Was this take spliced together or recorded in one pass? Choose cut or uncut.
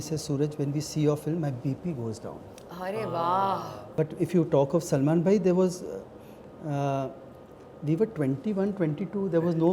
cut